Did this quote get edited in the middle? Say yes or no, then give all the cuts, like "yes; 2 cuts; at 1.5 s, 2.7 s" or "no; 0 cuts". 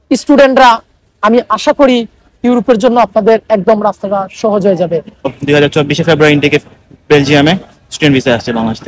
yes; 1 cut; at 5.3 s